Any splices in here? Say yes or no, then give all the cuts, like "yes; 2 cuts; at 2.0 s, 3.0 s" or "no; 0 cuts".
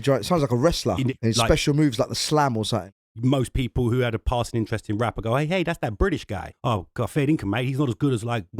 yes; 3 cuts; at 1.1 s, 2.9 s, 6.5 s